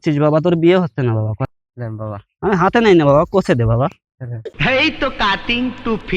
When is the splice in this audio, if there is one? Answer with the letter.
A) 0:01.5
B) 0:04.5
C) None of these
A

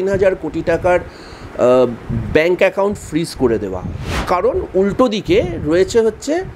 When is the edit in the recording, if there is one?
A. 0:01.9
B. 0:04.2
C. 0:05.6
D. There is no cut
B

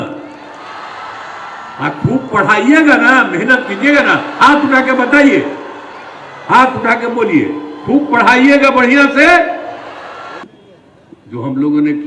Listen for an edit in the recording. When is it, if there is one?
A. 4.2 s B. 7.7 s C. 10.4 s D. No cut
C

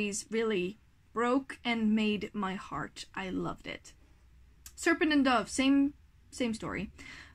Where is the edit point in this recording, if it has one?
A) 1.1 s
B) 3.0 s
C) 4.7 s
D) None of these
D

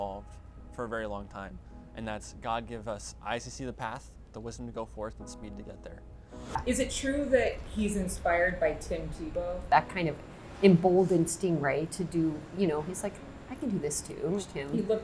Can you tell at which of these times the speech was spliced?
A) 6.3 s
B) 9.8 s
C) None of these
A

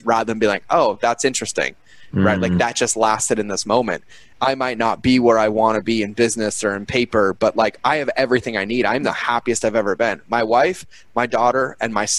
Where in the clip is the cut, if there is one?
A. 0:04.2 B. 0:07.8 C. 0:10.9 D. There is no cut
A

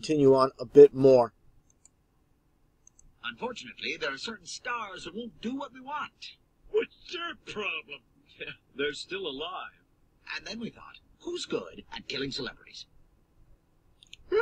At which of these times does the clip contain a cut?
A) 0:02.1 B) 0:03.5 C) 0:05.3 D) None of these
D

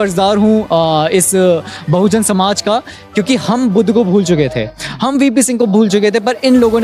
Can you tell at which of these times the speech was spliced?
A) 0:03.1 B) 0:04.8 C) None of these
C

